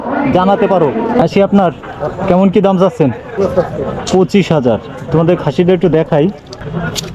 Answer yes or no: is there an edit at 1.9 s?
yes